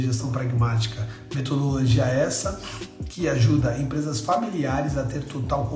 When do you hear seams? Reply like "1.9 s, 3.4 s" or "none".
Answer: none